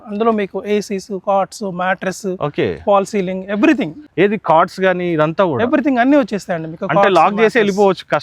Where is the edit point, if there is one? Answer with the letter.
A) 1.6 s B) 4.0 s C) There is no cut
C